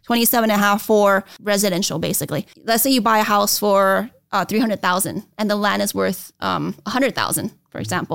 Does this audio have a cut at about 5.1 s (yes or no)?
no